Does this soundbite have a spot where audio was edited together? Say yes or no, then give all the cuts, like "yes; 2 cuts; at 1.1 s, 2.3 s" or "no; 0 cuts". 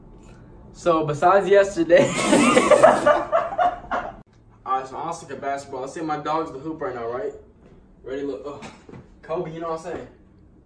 yes; 1 cut; at 4.1 s